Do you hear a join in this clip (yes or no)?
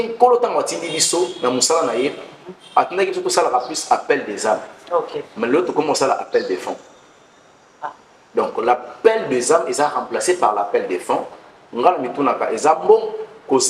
no